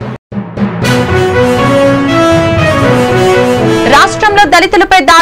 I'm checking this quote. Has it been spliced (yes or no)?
no